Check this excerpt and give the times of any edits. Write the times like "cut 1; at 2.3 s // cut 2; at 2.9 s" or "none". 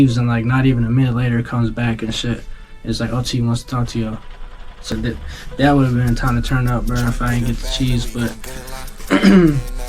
cut 1; at 4.9 s